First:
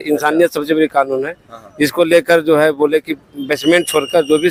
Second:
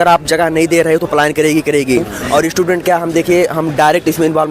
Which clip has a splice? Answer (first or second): second